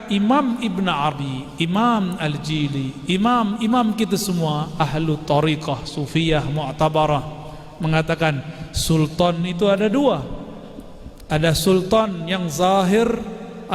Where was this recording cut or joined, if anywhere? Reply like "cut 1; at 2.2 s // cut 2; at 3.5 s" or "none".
cut 1; at 1.1 s